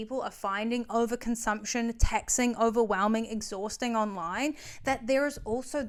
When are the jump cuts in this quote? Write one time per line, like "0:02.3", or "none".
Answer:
none